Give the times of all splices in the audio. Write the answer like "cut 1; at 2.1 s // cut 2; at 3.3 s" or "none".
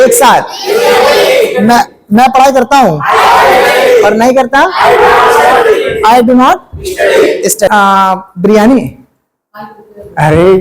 cut 1; at 7.7 s